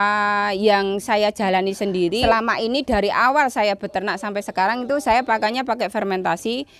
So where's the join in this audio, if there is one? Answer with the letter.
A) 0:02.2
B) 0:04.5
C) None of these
A